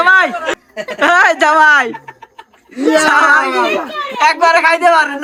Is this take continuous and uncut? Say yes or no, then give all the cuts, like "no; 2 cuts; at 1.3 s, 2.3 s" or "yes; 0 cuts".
yes; 0 cuts